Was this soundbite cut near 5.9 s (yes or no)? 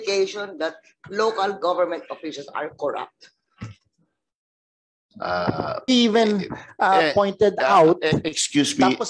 yes